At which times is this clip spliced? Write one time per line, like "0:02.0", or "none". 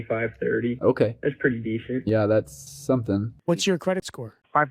0:03.3